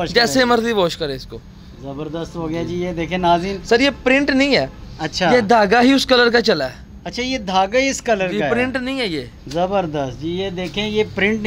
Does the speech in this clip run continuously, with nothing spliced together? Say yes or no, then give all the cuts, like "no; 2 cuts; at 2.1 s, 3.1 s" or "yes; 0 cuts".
yes; 0 cuts